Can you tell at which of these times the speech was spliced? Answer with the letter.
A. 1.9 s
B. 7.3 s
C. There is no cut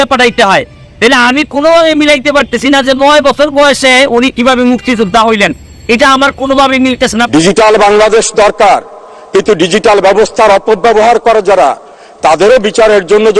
B